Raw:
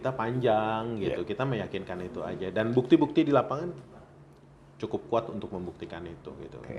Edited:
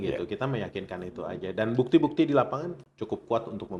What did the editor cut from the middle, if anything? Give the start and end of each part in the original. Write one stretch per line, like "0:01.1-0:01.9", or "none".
0:03.8-0:04.7